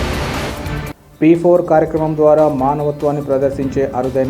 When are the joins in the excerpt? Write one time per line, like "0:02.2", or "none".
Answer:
0:00.9